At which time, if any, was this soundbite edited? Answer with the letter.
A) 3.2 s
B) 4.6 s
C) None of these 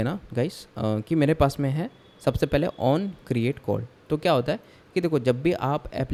C